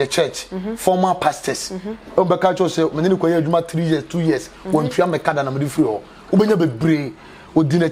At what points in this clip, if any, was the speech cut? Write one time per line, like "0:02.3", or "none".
none